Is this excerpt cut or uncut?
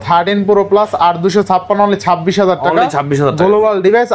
uncut